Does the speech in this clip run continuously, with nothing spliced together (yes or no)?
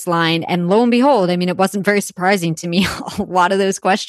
yes